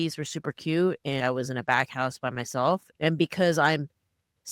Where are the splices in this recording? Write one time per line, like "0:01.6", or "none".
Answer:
0:01.2